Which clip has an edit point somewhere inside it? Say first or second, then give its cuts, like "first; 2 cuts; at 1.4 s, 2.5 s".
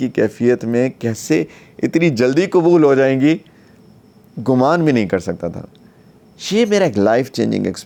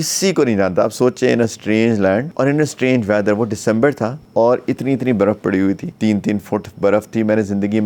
second; 3 cuts; at 2.3 s, 4.2 s, 5.9 s